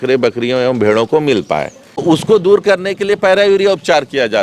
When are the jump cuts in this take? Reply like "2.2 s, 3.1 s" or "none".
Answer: 2.0 s